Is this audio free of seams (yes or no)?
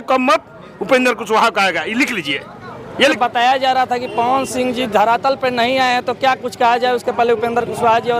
yes